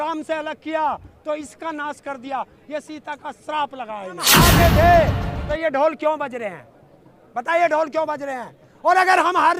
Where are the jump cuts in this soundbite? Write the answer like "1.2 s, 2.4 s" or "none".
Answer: 4.3 s